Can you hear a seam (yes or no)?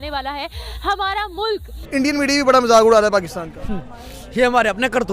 yes